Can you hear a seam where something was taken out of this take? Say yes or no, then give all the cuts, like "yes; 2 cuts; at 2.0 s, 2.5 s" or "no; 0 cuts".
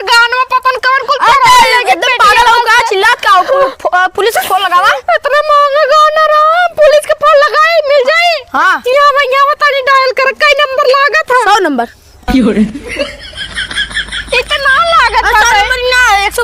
no; 0 cuts